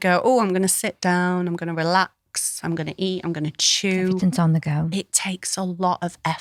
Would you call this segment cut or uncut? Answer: uncut